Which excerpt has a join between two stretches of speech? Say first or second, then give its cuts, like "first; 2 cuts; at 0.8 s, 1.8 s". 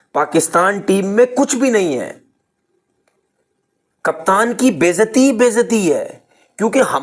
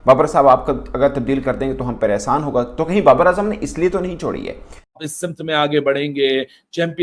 second; 1 cut; at 5.1 s